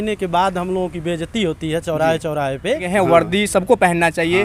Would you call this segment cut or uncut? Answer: cut